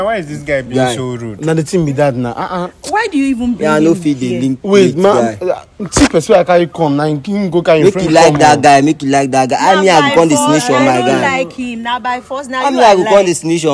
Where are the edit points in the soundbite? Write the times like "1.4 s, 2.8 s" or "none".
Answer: none